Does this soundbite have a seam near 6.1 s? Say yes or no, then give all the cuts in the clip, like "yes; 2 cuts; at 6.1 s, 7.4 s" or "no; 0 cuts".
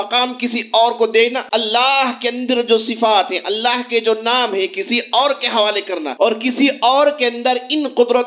yes; 2 cuts; at 1.4 s, 6.1 s